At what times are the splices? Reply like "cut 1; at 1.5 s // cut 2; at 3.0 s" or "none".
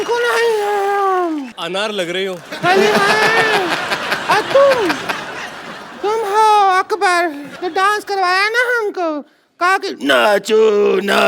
cut 1; at 1.6 s // cut 2; at 7.5 s